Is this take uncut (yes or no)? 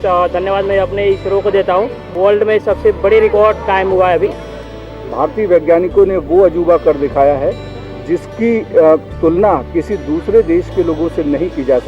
no